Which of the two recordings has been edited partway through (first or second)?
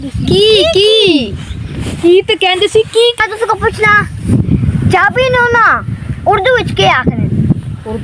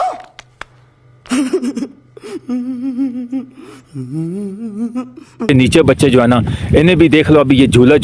first